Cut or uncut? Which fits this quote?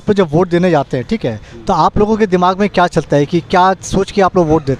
uncut